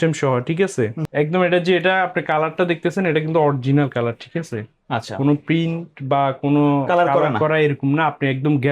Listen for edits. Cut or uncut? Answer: cut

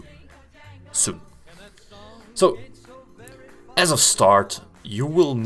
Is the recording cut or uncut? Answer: cut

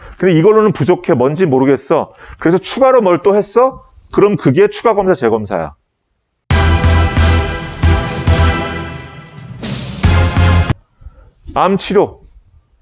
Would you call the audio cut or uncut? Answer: uncut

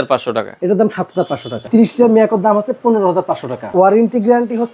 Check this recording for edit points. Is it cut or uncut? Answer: cut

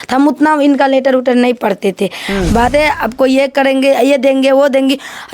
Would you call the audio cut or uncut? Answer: cut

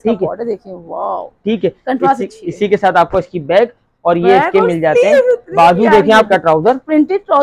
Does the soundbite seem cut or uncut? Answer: cut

